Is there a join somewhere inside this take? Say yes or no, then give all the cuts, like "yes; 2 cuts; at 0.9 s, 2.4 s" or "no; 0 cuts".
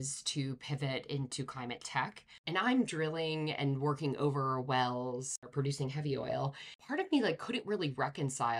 yes; 2 cuts; at 2.3 s, 6.8 s